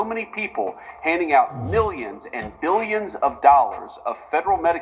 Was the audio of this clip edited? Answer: no; 0 cuts

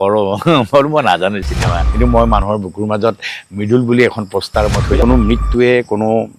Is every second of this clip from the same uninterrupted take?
no; 2 cuts; at 1.8 s, 4.9 s

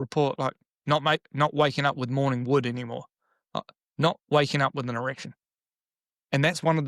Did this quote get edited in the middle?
no; 0 cuts

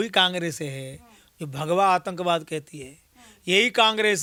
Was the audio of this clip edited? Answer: no; 0 cuts

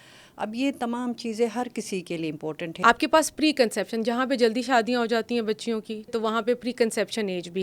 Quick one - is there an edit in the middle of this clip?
yes; 2 cuts; at 2.6 s, 6.1 s

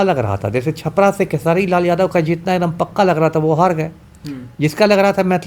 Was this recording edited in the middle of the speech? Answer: no; 0 cuts

